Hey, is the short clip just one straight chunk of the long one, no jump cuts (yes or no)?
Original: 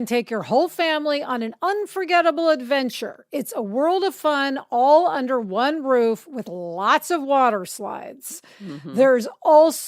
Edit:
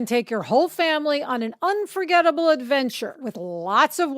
no